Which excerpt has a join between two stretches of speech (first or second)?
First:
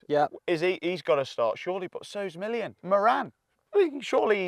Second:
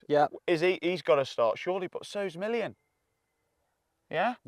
first